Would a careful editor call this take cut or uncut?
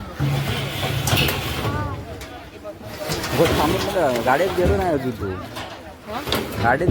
uncut